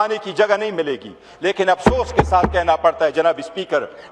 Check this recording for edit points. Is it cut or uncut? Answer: uncut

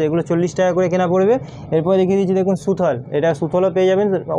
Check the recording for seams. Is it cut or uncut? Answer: uncut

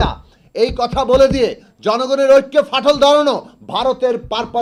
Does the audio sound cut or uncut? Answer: uncut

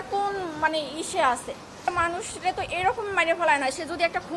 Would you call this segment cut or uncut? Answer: cut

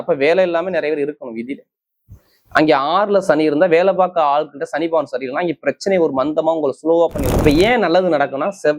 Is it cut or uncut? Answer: cut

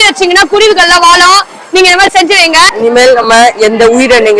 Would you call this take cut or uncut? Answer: cut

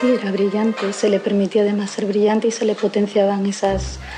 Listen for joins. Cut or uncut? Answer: cut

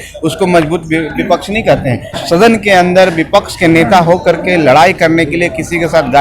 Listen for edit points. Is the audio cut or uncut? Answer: cut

